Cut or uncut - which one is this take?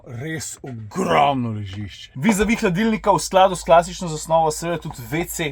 cut